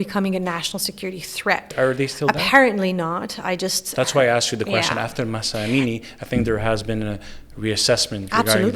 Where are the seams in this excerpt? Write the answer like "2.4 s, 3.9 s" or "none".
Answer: 1.7 s